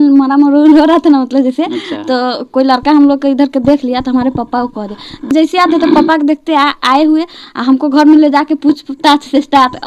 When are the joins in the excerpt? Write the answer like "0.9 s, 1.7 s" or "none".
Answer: 5.3 s